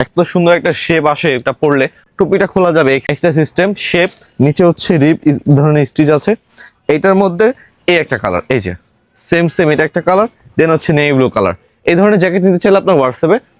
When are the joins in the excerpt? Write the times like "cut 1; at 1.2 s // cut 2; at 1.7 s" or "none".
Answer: none